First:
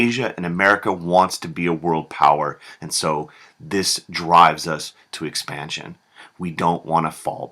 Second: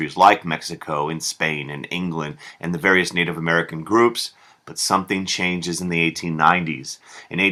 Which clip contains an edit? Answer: first; 1 cut; at 4.3 s

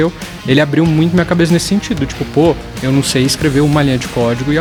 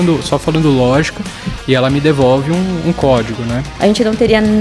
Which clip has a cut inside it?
second; 1 cut; at 3.6 s

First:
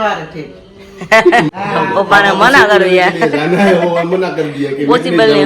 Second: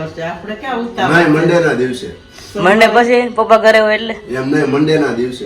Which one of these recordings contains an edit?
first; 1 cut; at 1.5 s

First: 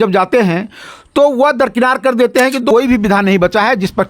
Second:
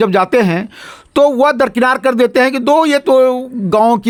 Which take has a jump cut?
first; 1 cut; at 2.7 s

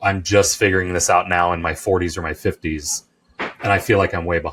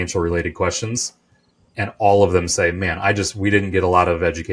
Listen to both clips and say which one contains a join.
second; 1 cut; at 1.6 s

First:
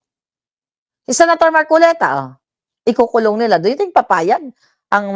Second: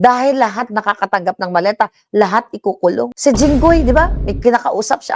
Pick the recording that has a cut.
second; 1 cut; at 3.1 s

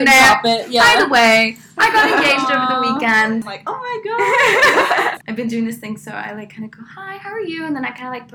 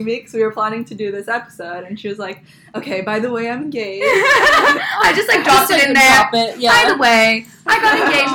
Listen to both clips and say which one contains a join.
first; 2 cuts; at 3.5 s, 5.2 s

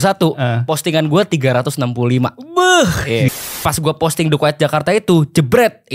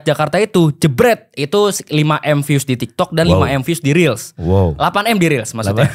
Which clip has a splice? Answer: first; 1 cut; at 3.5 s

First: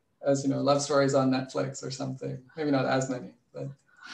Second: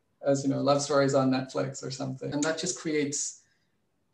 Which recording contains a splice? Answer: second; 1 cut; at 2.3 s

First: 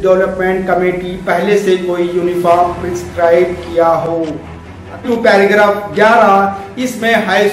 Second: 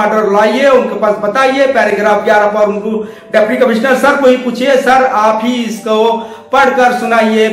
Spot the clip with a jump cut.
first; 1 cut; at 5.0 s

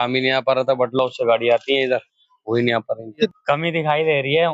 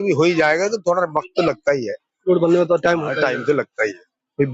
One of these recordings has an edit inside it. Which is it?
first; 1 cut; at 3.1 s

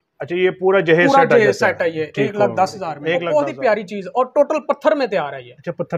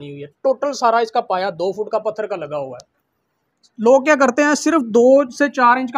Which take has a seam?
first; 1 cut; at 3.1 s

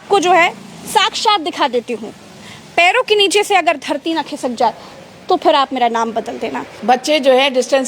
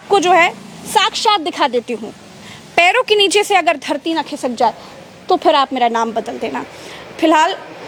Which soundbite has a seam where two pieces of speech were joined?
first; 1 cut; at 6.7 s

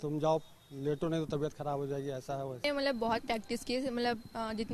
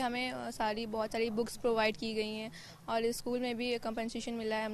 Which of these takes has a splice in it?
first; 1 cut; at 2.6 s

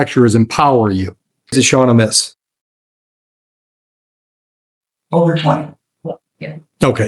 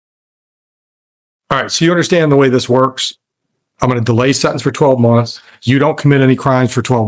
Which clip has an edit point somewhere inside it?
first; 1 cut; at 1.5 s

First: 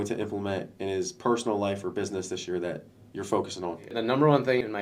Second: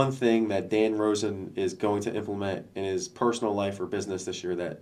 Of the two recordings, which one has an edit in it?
first; 1 cut; at 3.8 s

